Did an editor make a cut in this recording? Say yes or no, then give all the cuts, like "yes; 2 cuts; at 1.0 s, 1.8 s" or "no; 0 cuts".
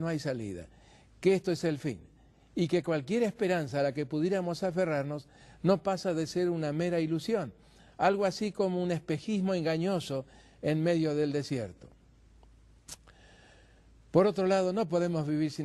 yes; 1 cut; at 5.5 s